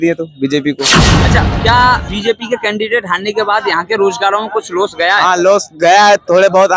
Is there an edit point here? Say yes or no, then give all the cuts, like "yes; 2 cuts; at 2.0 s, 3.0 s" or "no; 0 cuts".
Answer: yes; 1 cut; at 1.2 s